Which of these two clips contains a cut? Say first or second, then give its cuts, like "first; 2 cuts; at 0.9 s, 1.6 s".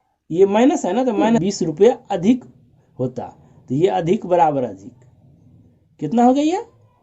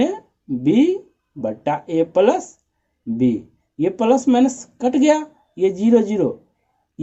first; 1 cut; at 1.4 s